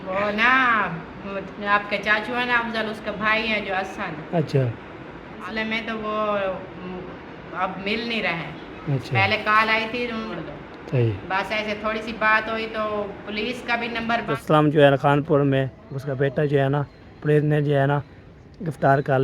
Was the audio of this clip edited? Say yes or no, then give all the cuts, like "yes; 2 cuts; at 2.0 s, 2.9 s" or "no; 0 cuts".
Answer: yes; 3 cuts; at 5.4 s, 10.3 s, 14.4 s